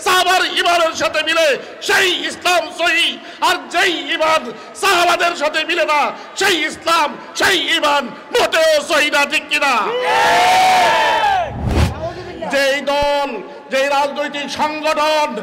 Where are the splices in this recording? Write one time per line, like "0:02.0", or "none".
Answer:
0:11.7